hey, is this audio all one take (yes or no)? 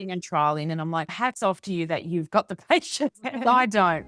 no